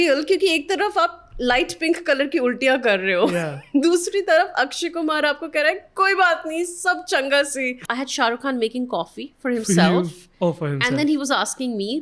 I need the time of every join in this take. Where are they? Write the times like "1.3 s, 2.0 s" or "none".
7.8 s